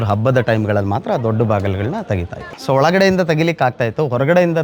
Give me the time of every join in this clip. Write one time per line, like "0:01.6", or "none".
0:02.5